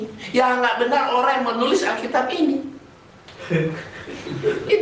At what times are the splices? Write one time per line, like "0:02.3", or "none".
none